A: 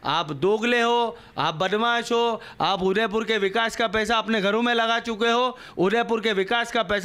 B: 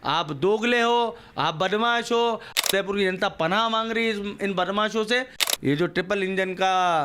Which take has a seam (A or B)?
B